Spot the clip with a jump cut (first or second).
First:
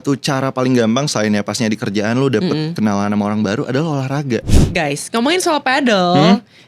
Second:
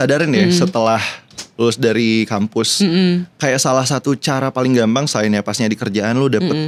first